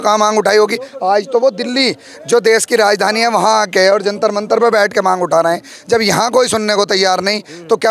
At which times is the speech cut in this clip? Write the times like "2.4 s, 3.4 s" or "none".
none